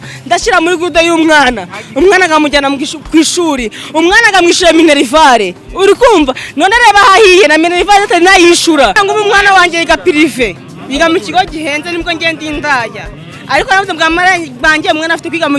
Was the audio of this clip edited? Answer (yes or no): yes